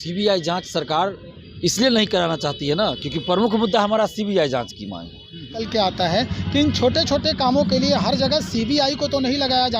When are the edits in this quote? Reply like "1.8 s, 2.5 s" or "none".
5.6 s